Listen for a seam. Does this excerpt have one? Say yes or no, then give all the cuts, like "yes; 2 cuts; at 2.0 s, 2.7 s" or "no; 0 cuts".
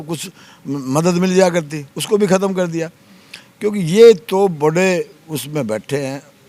no; 0 cuts